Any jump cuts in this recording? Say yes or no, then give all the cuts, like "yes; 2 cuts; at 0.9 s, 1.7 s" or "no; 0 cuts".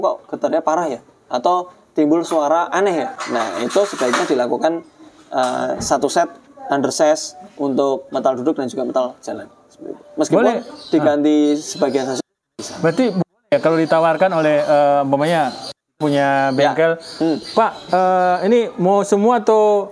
no; 0 cuts